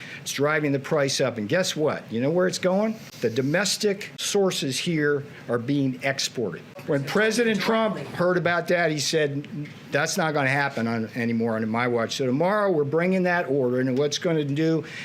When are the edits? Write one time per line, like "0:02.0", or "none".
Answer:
0:03.1
0:04.1